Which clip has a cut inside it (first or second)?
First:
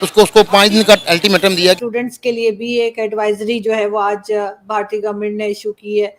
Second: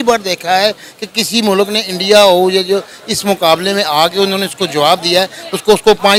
first